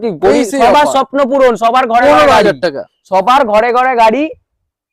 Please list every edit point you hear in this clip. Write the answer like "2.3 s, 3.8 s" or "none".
none

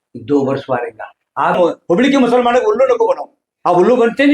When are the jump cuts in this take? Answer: 1.6 s

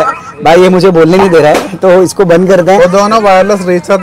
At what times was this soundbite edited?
none

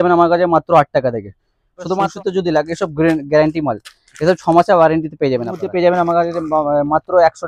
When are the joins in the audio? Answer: 2.0 s, 5.6 s

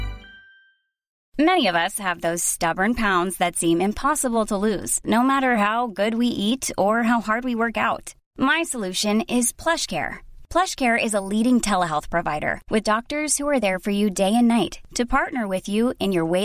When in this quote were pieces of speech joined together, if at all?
1.1 s

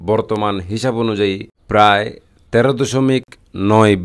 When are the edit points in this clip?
1.5 s

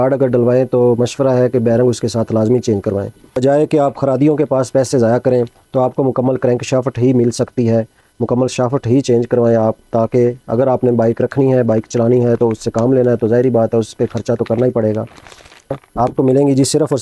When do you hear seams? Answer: 3.4 s, 15.8 s

